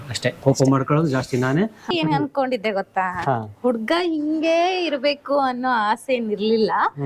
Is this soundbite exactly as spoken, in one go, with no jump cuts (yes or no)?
no